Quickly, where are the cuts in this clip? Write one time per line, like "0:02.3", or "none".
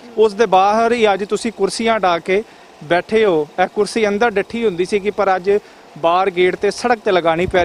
none